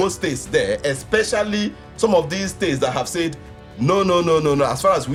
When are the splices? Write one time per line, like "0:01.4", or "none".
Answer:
none